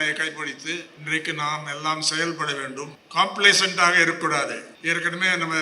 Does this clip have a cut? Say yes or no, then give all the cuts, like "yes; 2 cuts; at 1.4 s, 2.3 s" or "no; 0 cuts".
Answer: yes; 3 cuts; at 0.9 s, 3.0 s, 4.7 s